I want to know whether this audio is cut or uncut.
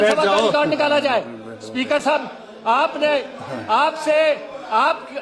uncut